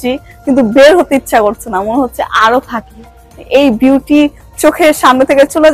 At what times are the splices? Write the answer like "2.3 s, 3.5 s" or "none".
none